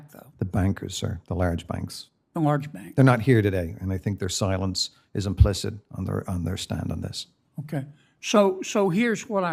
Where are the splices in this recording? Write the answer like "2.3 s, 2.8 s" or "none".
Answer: 7.8 s